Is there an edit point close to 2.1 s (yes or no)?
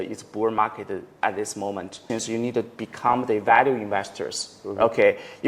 yes